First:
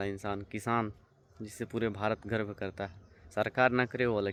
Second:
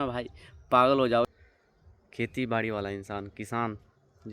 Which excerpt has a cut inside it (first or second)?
second